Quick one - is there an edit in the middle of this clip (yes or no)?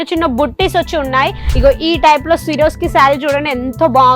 yes